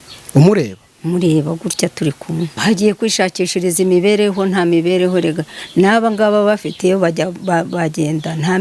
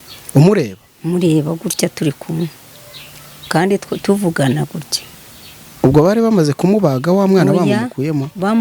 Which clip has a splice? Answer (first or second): first